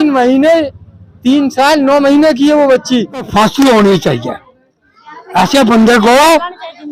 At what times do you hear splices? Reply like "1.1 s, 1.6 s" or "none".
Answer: 3.3 s